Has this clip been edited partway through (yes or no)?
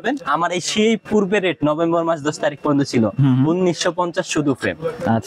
no